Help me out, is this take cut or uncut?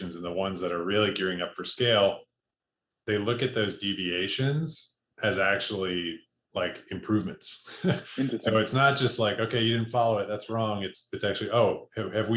uncut